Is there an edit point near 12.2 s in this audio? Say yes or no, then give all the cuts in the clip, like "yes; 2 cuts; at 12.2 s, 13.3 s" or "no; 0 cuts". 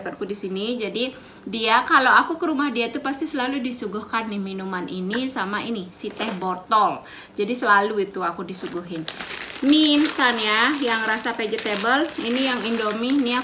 no; 1 cut; at 9.2 s